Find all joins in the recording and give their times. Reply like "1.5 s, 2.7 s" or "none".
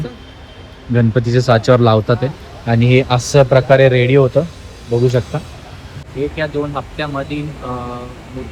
6.1 s